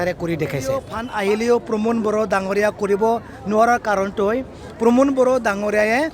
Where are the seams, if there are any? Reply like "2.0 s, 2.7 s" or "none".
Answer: 1.0 s